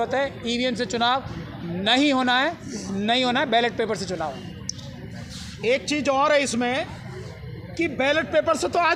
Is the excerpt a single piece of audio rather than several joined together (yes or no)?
yes